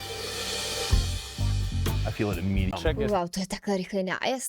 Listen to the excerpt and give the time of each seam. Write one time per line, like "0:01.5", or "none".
0:02.7